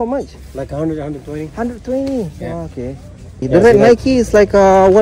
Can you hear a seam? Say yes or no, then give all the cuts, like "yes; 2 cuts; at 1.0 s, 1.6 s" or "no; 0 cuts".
yes; 1 cut; at 3.4 s